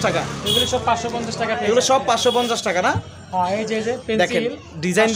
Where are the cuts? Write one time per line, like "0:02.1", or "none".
none